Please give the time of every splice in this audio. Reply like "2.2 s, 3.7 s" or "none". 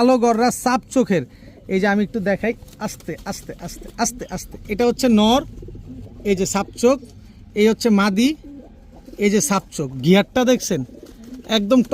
none